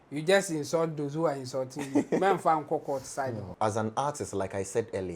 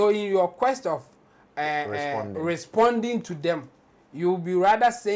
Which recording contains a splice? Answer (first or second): first